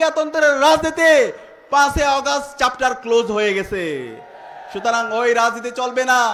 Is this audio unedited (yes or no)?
yes